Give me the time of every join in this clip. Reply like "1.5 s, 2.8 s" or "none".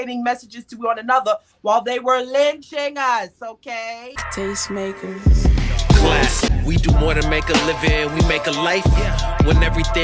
4.1 s